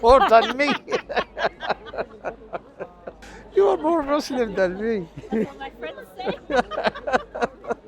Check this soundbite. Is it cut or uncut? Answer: cut